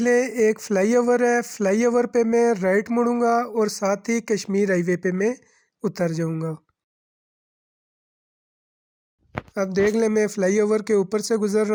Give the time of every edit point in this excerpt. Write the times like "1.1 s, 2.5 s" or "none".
none